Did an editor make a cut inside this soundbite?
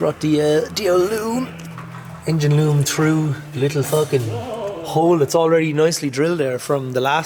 no; 0 cuts

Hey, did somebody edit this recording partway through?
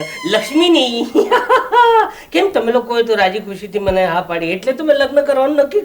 no; 0 cuts

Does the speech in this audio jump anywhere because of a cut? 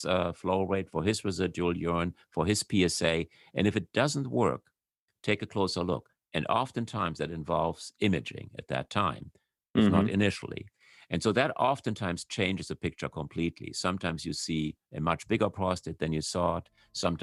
no; 0 cuts

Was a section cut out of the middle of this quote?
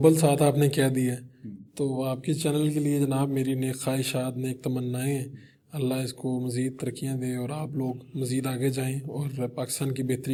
no; 0 cuts

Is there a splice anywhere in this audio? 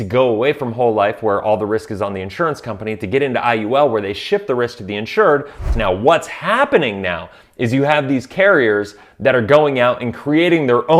yes; 1 cut; at 5.6 s

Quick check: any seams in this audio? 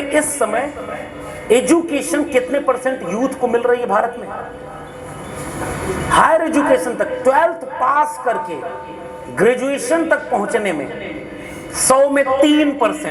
no; 0 cuts

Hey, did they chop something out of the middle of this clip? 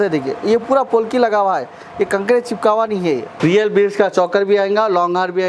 yes; 1 cut; at 3.3 s

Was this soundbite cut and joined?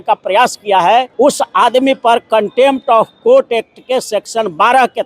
yes; 1 cut; at 1.1 s

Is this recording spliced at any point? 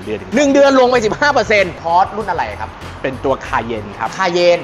yes; 1 cut; at 1.8 s

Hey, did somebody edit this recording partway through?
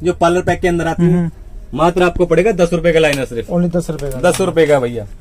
yes; 1 cut; at 1.4 s

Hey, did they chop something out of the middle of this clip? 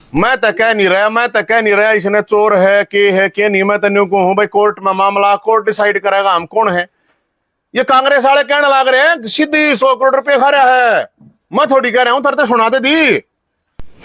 no; 0 cuts

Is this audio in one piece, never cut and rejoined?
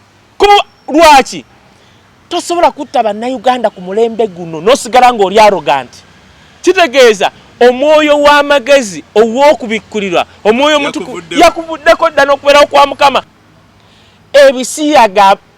no; 1 cut; at 13.3 s

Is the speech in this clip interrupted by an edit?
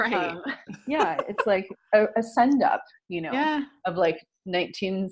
no; 0 cuts

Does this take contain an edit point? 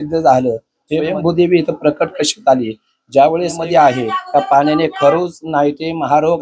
yes; 2 cuts; at 1.1 s, 3.6 s

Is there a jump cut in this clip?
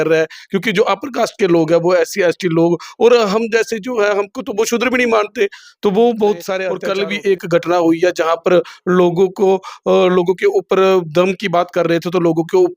yes; 1 cut; at 6.8 s

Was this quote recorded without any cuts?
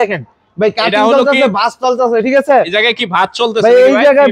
yes; 0 cuts

